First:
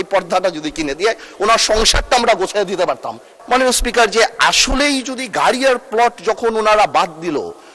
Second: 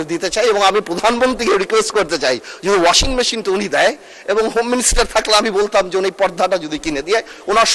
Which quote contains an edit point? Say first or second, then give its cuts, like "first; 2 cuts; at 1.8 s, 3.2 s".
first; 1 cut; at 3.2 s